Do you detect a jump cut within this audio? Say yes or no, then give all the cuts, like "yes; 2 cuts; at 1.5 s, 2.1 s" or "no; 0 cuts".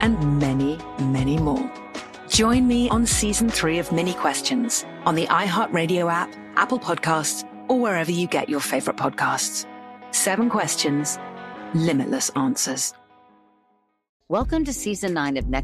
yes; 1 cut; at 14.1 s